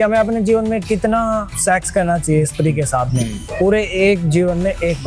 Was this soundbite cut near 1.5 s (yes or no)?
yes